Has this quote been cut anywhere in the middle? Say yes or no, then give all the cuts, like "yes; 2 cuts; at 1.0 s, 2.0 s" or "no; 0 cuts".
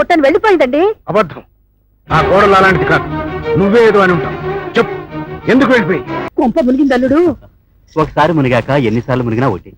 yes; 1 cut; at 6.2 s